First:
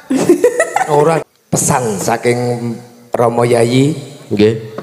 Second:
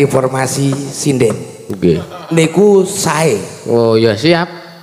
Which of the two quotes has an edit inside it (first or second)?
first